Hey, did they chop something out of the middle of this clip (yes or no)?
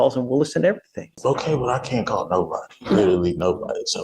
yes